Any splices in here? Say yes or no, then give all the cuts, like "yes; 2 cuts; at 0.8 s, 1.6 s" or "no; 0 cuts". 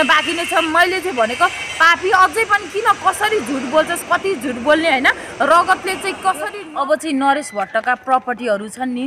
yes; 1 cut; at 6.5 s